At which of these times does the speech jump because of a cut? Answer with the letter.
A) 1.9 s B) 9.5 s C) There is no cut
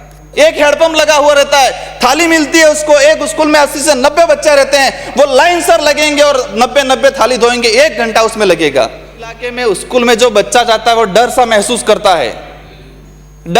B